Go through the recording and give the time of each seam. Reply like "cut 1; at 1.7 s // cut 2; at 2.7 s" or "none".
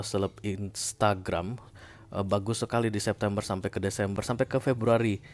none